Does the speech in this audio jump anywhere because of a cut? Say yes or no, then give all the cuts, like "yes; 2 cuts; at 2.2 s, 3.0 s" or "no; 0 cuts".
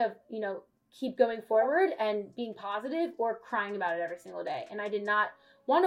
no; 0 cuts